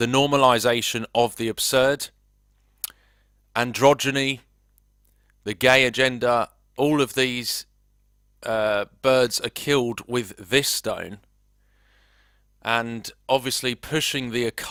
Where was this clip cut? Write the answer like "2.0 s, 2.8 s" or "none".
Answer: none